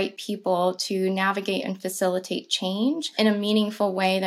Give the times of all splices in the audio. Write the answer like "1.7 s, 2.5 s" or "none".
3.1 s